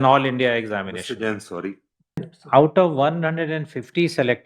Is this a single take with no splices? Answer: no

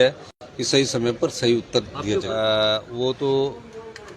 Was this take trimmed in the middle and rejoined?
yes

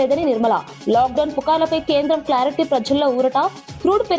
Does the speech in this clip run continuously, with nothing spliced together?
yes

